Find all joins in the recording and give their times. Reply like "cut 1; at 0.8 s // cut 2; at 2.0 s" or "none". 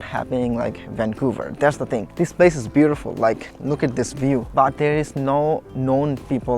cut 1; at 4.5 s